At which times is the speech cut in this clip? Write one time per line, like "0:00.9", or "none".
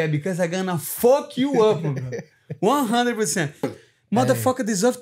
0:03.7